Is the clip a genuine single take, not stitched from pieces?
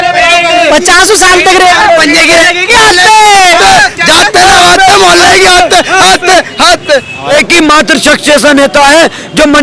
no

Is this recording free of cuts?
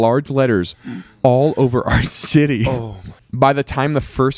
no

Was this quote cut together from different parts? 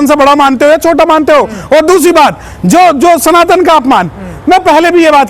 no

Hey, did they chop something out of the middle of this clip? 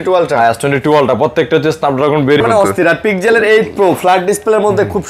yes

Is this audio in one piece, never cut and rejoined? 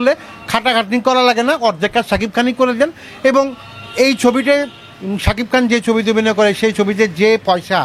yes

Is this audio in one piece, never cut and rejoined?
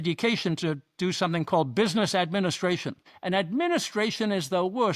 no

